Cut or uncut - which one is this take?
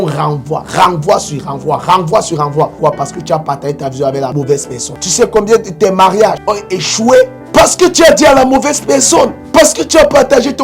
cut